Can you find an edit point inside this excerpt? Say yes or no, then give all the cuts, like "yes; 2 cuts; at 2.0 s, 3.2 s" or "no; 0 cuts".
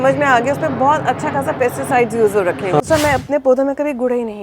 yes; 1 cut; at 2.8 s